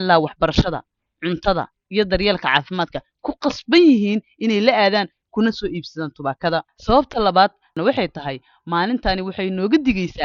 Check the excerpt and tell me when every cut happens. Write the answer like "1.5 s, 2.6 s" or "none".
none